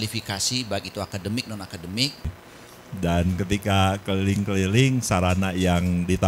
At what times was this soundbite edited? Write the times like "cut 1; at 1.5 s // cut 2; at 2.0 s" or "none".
cut 1; at 2.4 s